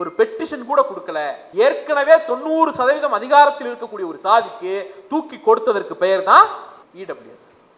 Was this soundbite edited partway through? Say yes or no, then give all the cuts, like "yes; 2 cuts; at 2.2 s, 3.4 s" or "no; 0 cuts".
yes; 2 cuts; at 1.4 s, 6.8 s